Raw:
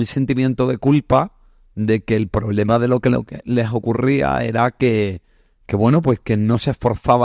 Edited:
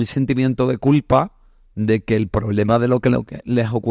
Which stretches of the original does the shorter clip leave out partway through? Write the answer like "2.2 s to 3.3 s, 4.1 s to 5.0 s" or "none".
none